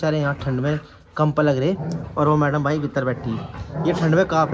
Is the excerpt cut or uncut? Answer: cut